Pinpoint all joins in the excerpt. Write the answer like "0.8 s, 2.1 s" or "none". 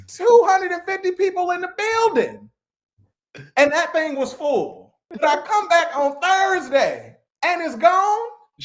5.0 s